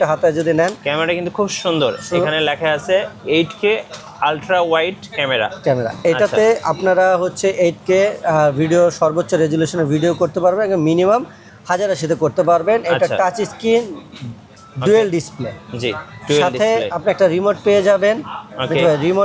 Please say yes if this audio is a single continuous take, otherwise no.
yes